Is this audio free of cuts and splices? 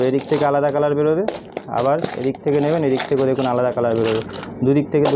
yes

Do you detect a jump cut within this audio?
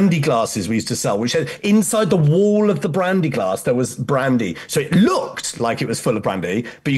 no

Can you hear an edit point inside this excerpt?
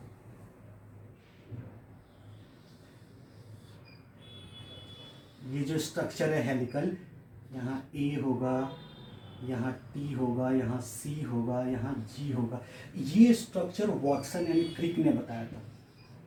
no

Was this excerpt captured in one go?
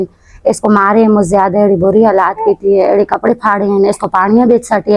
yes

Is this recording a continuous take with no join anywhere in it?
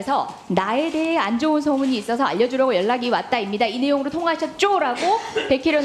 yes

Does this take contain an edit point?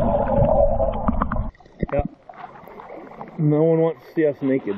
yes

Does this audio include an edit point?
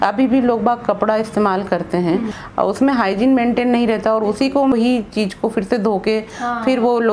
yes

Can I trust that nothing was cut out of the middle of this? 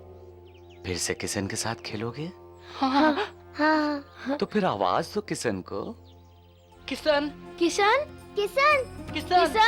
yes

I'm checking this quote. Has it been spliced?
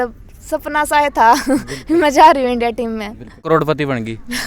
yes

